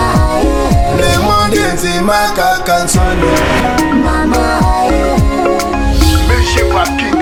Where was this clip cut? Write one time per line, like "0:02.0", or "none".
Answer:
none